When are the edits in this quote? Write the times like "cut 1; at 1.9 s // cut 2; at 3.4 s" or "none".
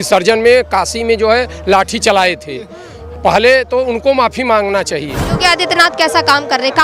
cut 1; at 5.2 s